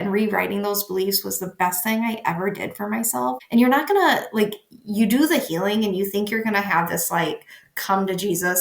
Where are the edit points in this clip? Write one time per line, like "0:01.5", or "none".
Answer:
0:03.4